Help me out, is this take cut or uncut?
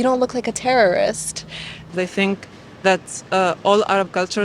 cut